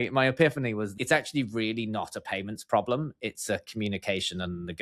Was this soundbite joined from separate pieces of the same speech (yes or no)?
yes